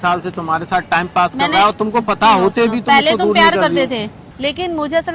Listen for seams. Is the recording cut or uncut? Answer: cut